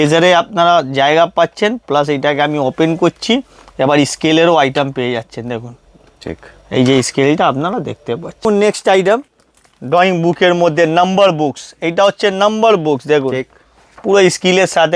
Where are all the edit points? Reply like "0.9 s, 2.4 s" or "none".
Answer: 8.4 s